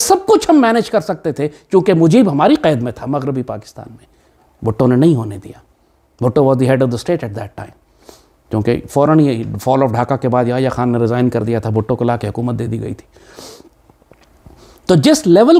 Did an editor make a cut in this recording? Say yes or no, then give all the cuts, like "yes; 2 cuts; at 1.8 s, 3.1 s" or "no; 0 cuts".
no; 0 cuts